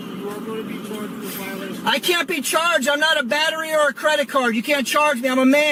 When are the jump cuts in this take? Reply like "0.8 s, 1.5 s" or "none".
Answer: none